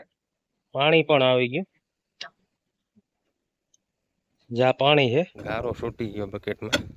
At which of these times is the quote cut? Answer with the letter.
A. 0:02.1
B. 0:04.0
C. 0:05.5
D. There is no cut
C